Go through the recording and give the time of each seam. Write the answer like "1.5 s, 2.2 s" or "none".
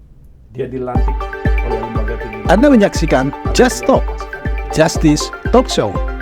0.9 s